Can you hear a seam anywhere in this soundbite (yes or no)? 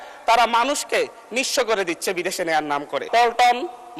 yes